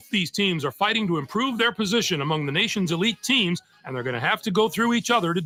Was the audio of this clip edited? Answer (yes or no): no